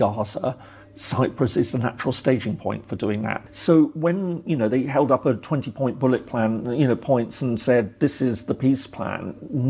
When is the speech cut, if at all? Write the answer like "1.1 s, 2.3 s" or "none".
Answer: 3.4 s